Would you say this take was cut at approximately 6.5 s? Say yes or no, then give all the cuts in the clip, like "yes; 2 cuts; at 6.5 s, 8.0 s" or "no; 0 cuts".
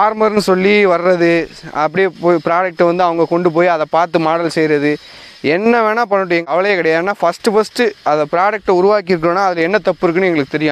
yes; 1 cut; at 6.5 s